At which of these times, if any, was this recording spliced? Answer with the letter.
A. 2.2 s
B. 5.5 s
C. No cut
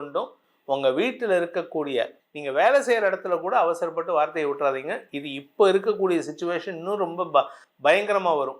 A